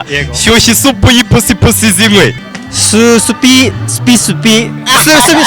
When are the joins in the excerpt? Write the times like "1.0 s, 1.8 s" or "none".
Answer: 2.5 s